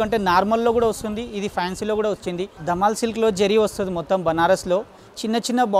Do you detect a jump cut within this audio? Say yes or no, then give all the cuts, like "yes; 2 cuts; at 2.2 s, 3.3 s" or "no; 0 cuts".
yes; 1 cut; at 2.5 s